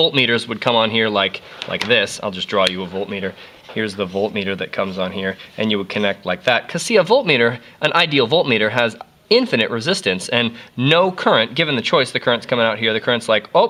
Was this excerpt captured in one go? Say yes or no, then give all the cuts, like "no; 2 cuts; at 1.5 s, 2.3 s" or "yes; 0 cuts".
yes; 0 cuts